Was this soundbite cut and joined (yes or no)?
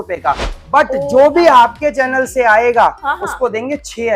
no